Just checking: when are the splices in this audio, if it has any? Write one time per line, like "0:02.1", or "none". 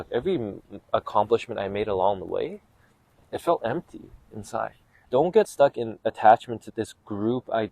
0:05.0
0:06.7